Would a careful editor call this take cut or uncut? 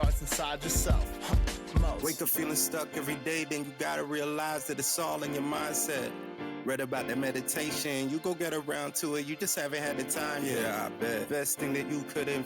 uncut